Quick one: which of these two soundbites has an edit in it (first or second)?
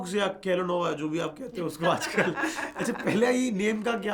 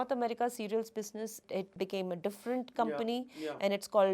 second